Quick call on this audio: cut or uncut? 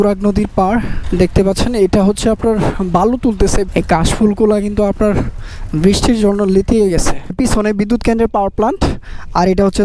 cut